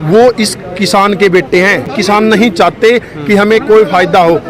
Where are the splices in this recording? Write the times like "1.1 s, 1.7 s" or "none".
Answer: 1.9 s

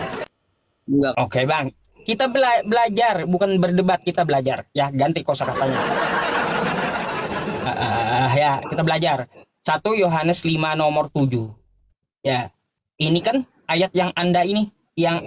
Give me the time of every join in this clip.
1.1 s

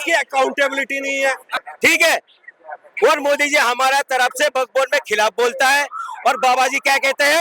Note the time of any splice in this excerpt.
1.5 s

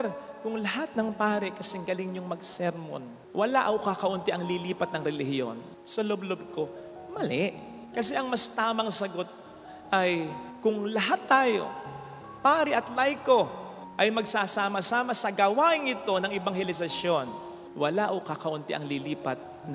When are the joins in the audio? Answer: none

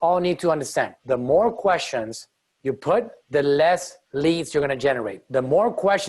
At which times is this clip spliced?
1.0 s, 3.2 s, 4.0 s, 5.1 s

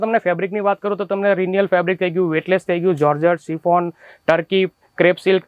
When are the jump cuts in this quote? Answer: none

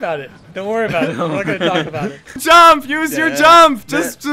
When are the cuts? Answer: 2.4 s

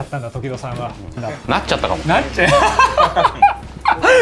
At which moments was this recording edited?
1.0 s

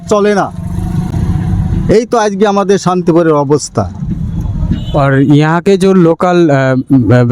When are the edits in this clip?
none

